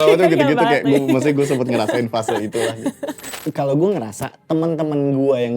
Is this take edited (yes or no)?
yes